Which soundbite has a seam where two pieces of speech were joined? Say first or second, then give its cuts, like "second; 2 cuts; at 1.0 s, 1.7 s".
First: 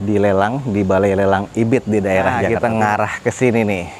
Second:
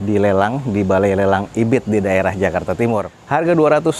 first; 1 cut; at 2.5 s